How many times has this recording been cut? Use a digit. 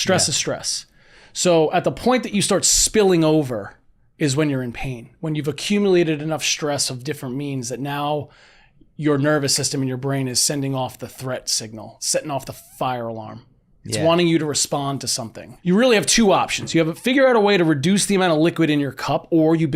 1